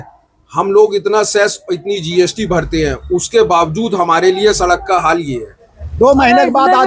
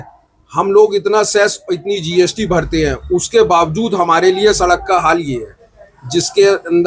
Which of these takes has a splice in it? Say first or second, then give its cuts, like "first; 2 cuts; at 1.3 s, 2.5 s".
first; 1 cut; at 5.9 s